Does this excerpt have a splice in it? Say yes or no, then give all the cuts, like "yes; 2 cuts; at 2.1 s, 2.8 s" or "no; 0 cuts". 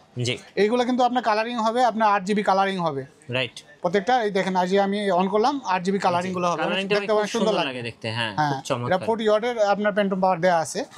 no; 0 cuts